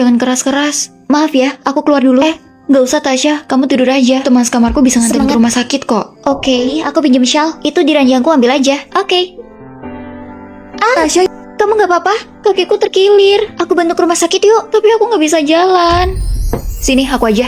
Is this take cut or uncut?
cut